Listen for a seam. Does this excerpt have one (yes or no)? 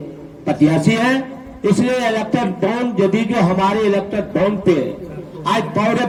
no